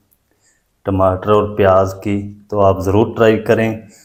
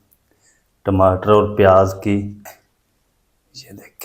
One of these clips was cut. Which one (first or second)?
second